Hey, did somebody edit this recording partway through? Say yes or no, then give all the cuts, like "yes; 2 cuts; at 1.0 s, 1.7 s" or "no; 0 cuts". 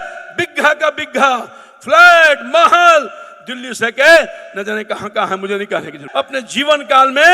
yes; 1 cut; at 6.0 s